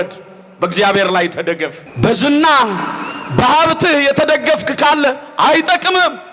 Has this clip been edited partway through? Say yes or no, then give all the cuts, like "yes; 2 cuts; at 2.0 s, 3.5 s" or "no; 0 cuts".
yes; 1 cut; at 1.8 s